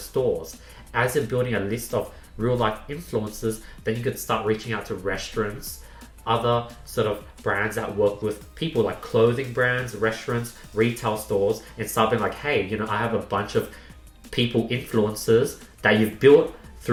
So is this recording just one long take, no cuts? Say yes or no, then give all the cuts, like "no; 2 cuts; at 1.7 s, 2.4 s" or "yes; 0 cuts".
yes; 0 cuts